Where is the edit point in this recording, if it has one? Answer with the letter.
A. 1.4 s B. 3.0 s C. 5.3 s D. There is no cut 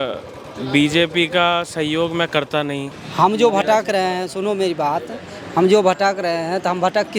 B